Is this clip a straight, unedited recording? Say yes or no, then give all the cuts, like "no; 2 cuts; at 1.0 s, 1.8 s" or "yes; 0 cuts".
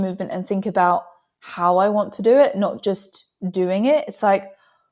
yes; 0 cuts